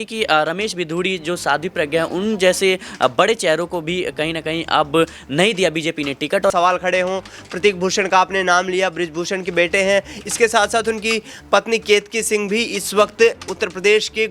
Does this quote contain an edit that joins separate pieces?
yes; 1 cut; at 6.5 s

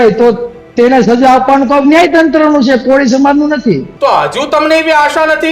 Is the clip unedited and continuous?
no; 1 cut; at 3.9 s

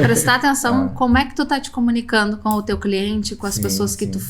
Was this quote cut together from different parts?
yes; 1 cut; at 2.4 s

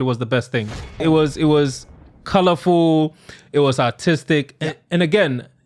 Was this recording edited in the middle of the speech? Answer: yes; 1 cut; at 1.0 s

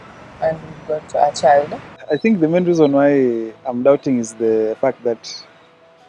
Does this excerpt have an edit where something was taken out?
yes; 1 cut; at 1.9 s

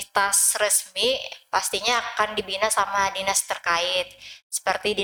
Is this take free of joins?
yes; 0 cuts

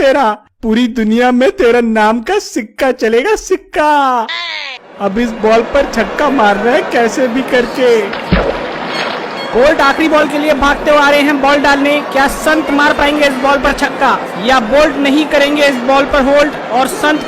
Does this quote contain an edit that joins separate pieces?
yes; 1 cut; at 4.7 s

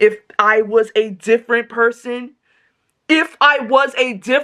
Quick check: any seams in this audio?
no; 0 cuts

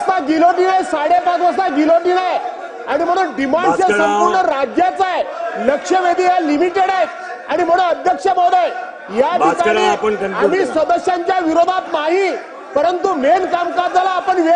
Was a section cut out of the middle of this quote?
no; 0 cuts

